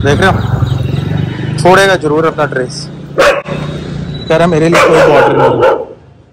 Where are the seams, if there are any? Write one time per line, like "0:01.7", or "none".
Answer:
none